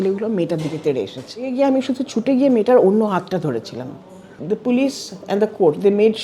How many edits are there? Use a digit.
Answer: 2